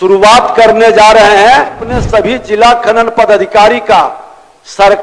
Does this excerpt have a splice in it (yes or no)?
yes